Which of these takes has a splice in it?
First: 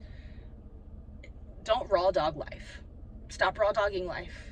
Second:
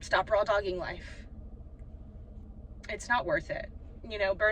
second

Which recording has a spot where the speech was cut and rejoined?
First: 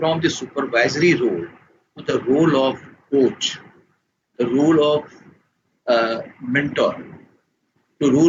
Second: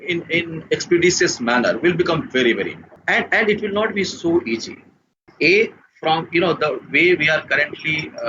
second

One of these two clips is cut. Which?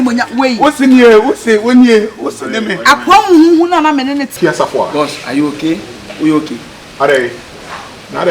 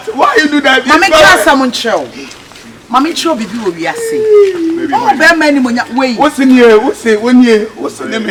first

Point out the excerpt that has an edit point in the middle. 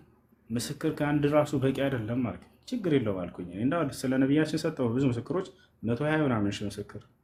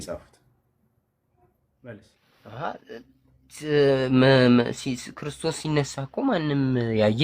second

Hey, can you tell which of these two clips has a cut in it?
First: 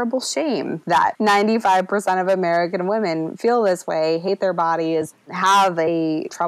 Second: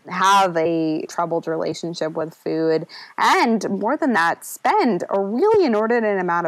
first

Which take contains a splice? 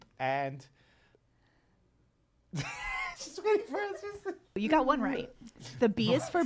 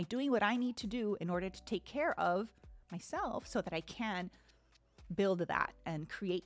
first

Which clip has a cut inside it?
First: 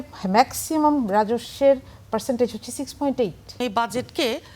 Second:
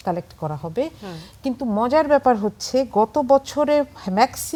first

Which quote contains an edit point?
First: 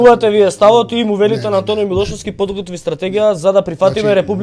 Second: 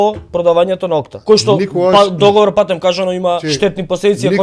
second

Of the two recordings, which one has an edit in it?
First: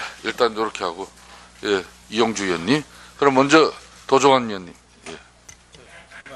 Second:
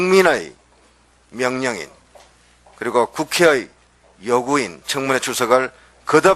first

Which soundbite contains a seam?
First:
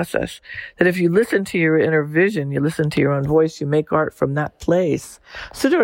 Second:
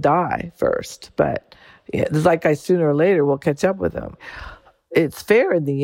second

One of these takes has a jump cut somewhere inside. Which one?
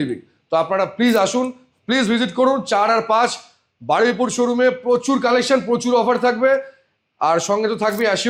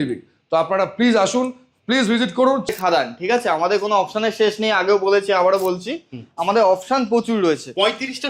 second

